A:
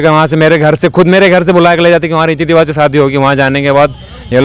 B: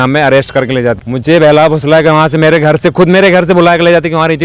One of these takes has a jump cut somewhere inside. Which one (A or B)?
B